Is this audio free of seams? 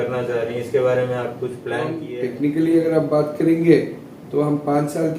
no; 1 cut; at 2.0 s

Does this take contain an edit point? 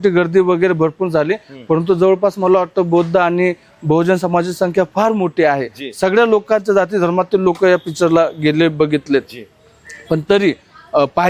no; 0 cuts

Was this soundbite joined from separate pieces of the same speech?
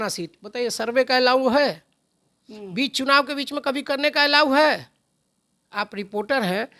no; 0 cuts

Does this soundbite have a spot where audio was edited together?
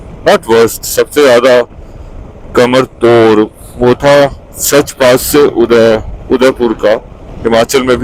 no; 0 cuts

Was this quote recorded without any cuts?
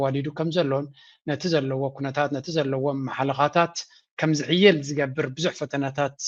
yes; 0 cuts

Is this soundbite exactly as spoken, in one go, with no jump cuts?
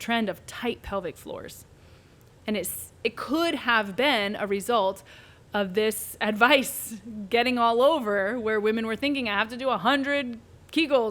yes; 0 cuts

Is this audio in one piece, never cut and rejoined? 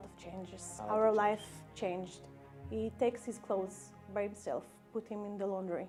yes; 0 cuts

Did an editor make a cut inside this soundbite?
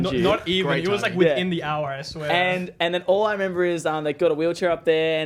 no; 0 cuts

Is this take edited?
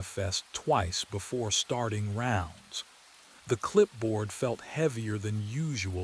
yes; 1 cut; at 3.9 s

